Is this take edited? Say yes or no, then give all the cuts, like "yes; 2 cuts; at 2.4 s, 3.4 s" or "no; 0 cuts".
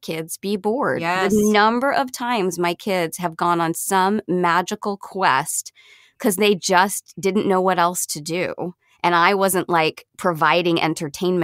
no; 0 cuts